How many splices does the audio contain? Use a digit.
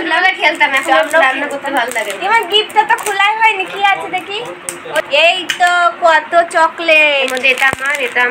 1